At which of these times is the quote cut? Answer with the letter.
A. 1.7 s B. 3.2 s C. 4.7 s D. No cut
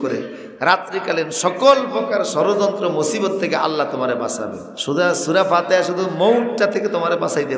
C